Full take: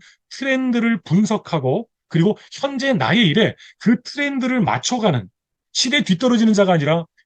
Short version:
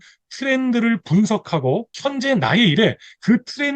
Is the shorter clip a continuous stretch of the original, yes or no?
no